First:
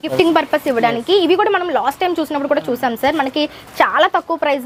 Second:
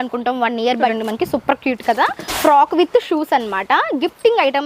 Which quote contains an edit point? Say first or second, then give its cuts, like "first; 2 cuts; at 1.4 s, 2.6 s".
second; 1 cut; at 0.9 s